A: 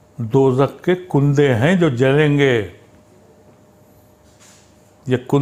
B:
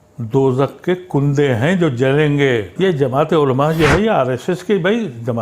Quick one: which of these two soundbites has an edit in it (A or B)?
B